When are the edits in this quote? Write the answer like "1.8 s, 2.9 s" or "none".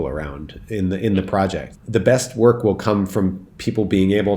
1.7 s